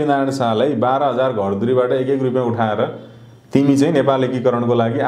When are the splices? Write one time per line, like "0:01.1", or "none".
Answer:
none